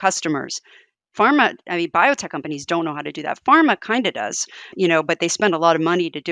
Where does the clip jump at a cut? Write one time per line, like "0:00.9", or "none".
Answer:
none